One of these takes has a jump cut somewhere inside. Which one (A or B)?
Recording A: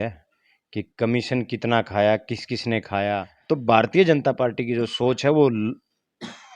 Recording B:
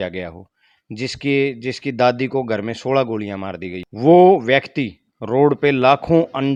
A